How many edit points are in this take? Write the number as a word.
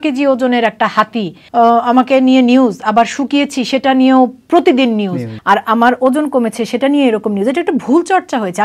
two